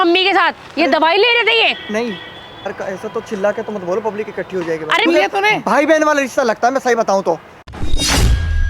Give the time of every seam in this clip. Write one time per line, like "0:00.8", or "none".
0:02.7
0:05.1
0:07.7